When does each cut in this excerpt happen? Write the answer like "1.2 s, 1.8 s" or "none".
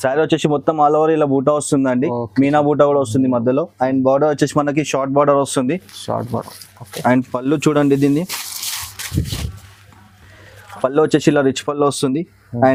none